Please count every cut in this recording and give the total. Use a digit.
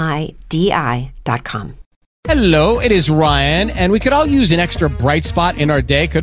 1